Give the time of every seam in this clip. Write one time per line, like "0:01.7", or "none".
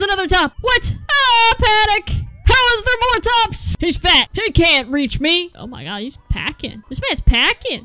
0:03.7